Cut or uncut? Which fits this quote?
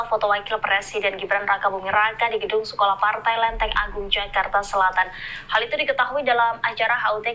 uncut